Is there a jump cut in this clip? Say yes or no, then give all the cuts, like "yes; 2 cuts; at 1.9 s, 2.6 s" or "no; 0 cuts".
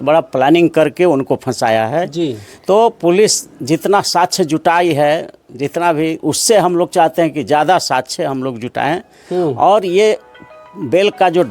no; 0 cuts